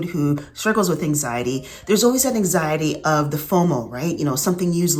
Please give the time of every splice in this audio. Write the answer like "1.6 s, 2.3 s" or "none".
none